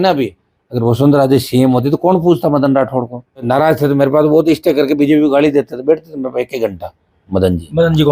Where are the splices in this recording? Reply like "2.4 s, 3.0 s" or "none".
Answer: 3.5 s